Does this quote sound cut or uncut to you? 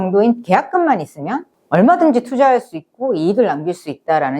cut